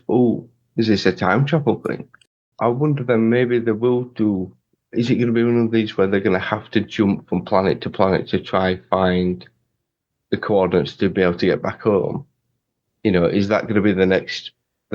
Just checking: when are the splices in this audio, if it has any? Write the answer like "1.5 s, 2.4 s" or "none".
2.4 s